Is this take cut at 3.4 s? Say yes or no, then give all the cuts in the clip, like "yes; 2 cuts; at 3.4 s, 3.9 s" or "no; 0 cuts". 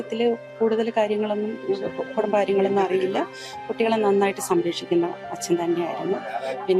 no; 0 cuts